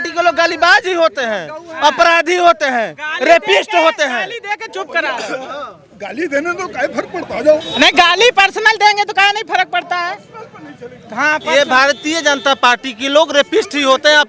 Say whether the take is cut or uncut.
uncut